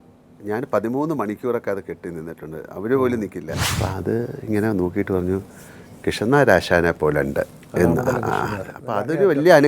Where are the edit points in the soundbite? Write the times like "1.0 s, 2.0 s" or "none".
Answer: 3.6 s